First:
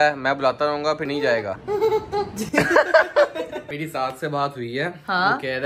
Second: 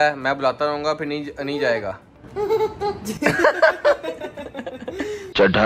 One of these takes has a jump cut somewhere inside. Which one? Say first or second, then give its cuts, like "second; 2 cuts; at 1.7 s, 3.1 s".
first; 2 cuts; at 1.2 s, 3.8 s